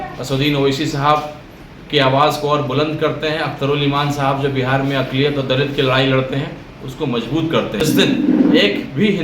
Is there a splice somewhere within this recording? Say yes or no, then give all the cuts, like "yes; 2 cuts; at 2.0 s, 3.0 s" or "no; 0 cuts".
yes; 1 cut; at 7.8 s